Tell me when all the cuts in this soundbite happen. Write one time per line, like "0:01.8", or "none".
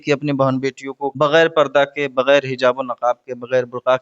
0:01.1